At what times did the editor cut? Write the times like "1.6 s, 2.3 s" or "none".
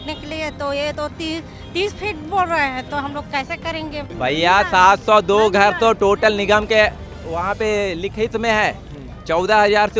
4.0 s